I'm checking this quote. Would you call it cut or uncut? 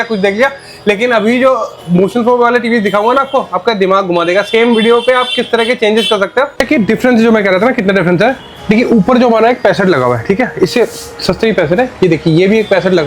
cut